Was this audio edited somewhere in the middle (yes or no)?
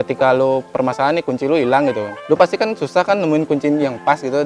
yes